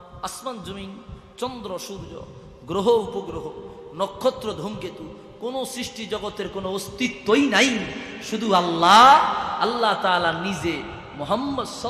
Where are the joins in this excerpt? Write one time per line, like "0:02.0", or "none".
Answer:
none